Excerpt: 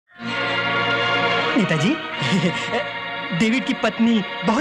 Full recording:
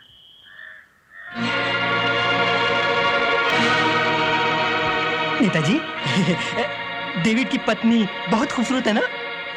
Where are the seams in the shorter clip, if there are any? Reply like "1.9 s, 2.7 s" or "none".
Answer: 1.5 s